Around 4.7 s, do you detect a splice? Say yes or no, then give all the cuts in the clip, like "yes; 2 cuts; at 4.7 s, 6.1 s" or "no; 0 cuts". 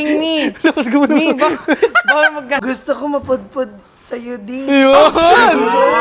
no; 1 cut; at 2.6 s